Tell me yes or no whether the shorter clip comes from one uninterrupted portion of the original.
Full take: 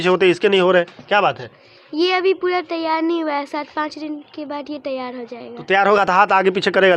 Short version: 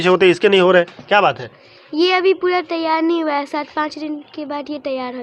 yes